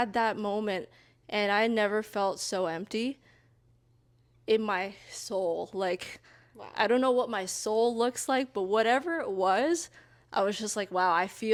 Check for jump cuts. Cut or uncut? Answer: uncut